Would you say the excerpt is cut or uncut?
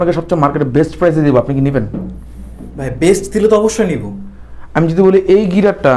uncut